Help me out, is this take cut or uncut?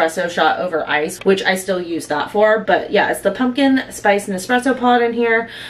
uncut